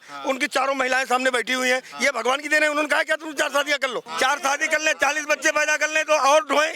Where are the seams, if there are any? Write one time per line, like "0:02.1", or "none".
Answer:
0:04.0